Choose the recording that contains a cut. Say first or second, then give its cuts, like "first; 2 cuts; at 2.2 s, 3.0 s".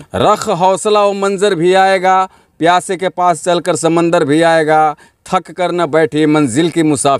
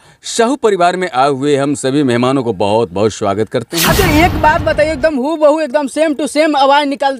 second; 1 cut; at 3.8 s